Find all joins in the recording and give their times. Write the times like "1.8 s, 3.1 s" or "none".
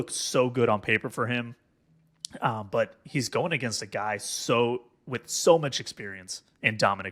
none